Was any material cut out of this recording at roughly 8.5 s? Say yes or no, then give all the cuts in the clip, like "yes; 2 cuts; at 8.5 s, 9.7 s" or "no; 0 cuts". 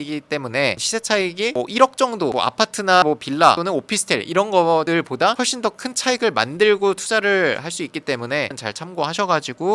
yes; 3 cuts; at 0.8 s, 2.3 s, 8.5 s